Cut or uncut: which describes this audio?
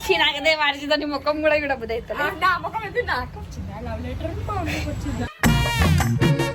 uncut